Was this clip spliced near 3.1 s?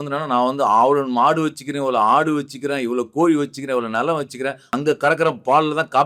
no; 1 cut; at 4.7 s

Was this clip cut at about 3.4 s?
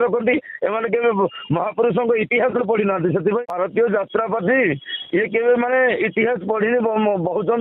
yes; 1 cut; at 3.4 s

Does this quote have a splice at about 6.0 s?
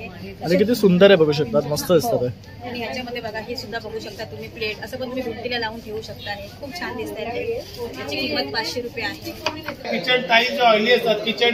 no; 1 cut; at 9.9 s

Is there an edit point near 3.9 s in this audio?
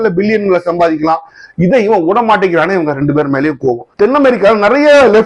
yes; 1 cut; at 3.9 s

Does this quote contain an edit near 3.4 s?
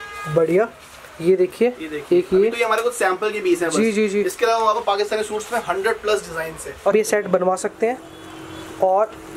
no; 1 cut; at 6.9 s

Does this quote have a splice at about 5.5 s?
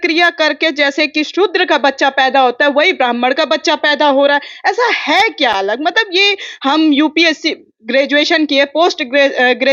no; 0 cuts

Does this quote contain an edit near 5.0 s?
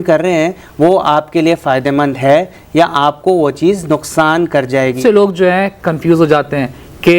yes; 1 cut; at 5.0 s

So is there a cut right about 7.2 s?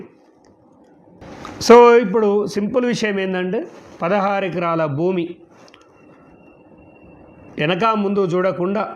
no; 1 cut; at 1.2 s

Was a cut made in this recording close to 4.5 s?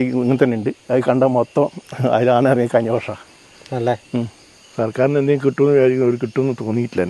yes; 1 cut; at 4.5 s

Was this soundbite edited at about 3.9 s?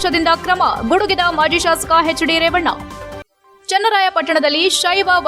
no; 0 cuts

